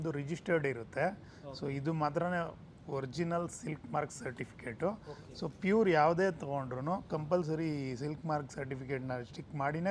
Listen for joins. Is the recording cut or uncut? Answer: uncut